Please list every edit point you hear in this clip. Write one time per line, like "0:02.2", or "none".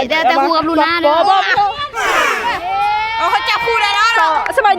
0:02.4